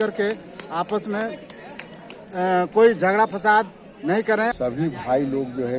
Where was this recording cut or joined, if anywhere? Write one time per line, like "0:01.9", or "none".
0:04.5